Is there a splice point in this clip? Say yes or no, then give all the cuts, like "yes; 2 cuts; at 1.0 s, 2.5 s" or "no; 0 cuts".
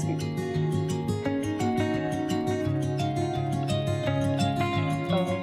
no; 0 cuts